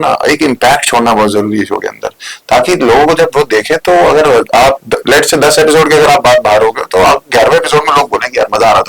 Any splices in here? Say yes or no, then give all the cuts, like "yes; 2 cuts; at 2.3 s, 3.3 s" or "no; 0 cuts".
no; 0 cuts